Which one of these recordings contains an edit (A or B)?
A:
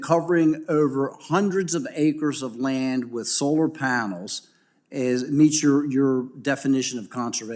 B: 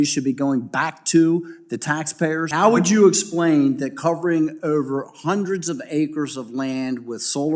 B